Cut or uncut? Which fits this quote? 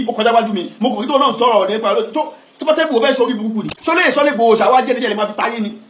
cut